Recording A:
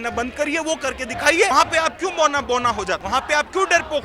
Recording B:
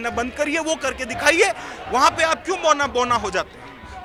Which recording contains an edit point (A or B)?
A